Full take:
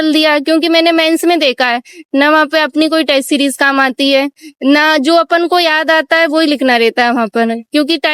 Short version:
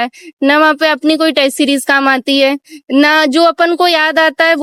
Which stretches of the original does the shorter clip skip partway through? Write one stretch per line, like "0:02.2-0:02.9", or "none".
none